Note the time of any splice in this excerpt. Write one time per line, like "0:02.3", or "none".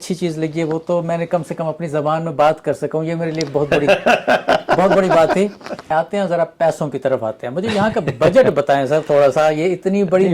0:05.7